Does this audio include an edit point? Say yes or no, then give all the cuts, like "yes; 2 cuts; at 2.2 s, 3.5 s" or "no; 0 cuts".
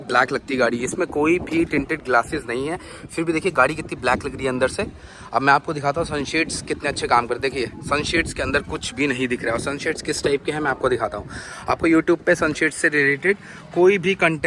no; 0 cuts